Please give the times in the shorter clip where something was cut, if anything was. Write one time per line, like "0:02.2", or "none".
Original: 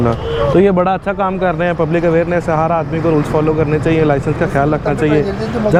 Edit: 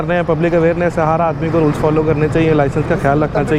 none